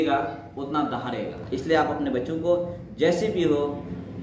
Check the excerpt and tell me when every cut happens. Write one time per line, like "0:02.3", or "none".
0:01.3

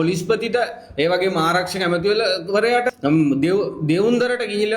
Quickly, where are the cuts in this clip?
0:02.9

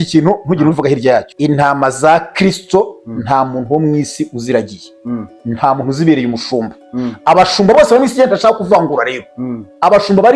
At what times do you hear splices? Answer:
0:01.3

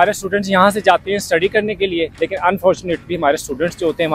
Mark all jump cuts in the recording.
0:02.1

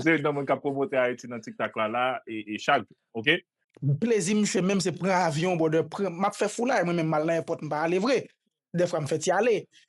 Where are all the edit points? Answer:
0:03.6

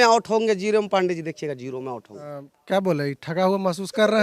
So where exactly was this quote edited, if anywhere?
0:02.5

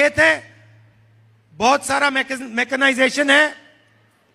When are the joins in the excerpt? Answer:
none

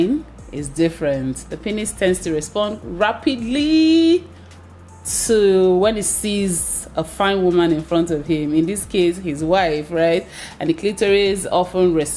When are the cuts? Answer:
none

